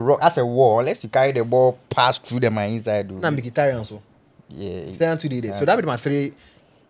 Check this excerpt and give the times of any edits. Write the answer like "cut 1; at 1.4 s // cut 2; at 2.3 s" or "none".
none